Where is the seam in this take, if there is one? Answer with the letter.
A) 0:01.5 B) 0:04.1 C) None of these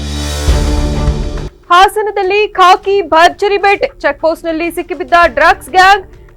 A